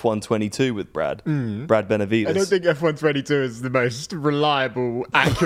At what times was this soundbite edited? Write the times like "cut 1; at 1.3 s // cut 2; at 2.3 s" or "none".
cut 1; at 2.4 s